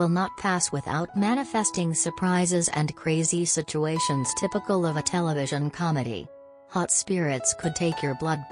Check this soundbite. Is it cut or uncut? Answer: cut